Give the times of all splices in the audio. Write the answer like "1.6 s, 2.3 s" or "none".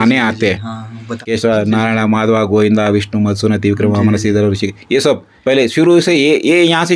1.2 s